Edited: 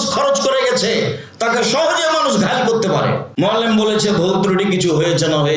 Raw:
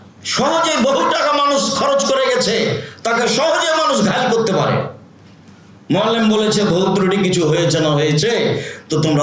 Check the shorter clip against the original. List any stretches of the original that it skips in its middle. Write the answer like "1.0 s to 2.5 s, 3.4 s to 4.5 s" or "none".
4.9 s to 5.8 s